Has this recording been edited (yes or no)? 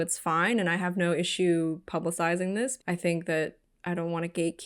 yes